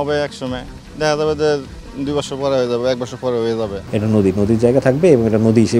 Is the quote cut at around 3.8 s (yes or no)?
yes